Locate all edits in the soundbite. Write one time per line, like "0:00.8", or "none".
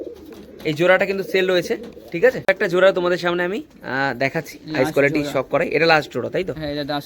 0:02.4